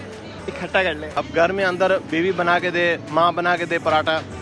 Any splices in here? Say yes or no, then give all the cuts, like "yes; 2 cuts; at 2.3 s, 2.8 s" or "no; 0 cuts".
yes; 1 cut; at 1.2 s